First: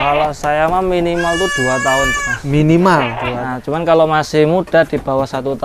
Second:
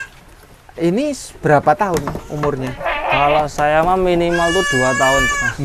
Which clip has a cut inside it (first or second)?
first